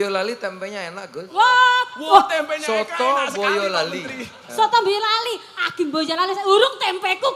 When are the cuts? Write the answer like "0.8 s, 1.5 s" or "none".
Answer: none